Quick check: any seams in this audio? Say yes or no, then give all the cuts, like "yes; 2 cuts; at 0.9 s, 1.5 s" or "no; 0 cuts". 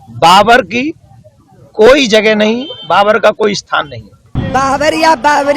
yes; 1 cut; at 4.3 s